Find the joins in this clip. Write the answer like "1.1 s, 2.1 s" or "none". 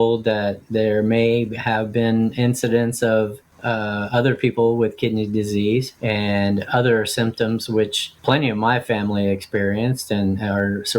3.5 s, 5.9 s, 8.1 s